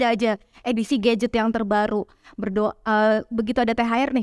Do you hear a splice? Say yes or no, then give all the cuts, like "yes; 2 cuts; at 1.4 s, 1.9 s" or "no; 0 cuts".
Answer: no; 0 cuts